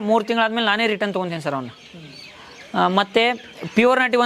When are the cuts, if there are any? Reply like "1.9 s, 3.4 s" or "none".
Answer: none